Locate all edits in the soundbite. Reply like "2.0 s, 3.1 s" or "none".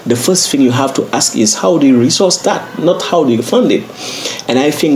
none